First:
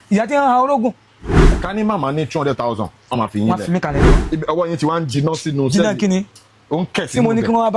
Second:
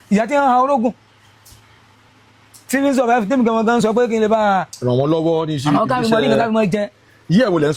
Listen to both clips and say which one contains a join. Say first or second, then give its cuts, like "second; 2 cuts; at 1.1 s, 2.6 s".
first; 2 cuts; at 1.6 s, 4.2 s